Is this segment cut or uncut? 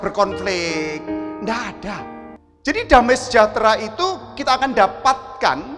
cut